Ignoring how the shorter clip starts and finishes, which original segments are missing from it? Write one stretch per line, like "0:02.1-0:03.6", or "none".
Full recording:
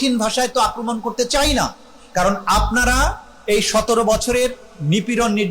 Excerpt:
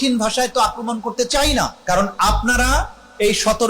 0:01.8-0:02.0